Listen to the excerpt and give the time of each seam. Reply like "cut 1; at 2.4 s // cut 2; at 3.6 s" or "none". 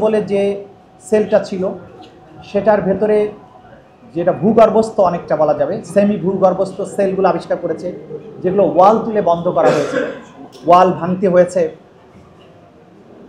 none